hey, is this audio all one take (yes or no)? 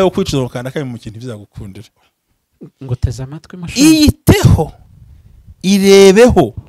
no